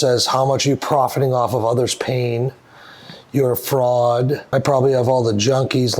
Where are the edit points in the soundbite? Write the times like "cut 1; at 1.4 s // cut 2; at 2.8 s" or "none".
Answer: cut 1; at 4.4 s